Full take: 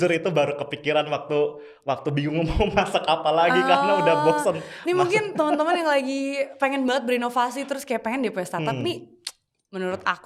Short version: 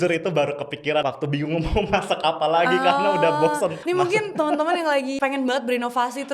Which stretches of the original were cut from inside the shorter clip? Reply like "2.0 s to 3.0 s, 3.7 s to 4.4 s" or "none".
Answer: 1.0 s to 1.9 s, 4.6 s to 4.8 s, 6.1 s to 6.5 s